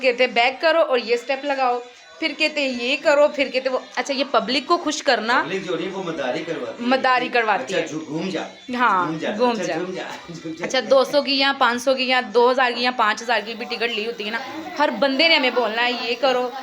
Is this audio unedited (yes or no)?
yes